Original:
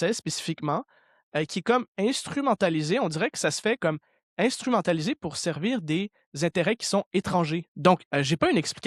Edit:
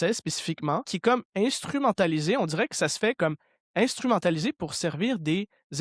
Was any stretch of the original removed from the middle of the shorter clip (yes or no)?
yes